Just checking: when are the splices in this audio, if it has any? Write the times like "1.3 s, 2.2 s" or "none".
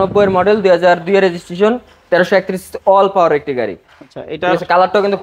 none